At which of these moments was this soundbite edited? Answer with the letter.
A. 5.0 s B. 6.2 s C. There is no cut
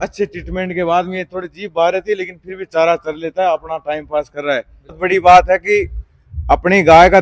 A